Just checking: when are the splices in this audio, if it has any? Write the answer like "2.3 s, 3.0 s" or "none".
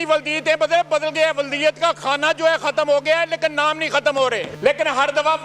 4.5 s